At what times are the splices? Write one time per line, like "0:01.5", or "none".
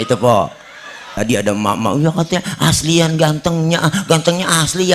0:01.1